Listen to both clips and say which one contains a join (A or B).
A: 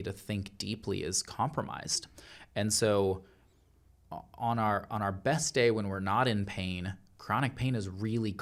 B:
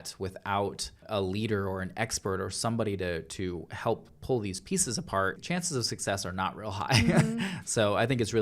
B